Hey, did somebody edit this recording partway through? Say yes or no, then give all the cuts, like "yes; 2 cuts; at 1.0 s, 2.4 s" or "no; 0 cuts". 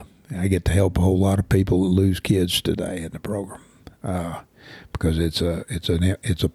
no; 0 cuts